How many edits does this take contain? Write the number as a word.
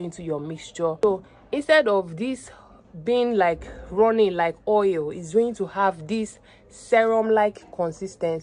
one